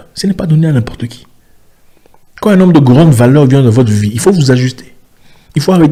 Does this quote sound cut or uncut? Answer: uncut